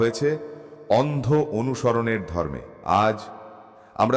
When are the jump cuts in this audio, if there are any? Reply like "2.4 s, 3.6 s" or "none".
2.7 s